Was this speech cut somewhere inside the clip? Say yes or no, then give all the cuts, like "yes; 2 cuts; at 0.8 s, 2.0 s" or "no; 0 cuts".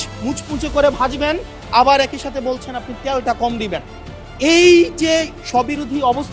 no; 0 cuts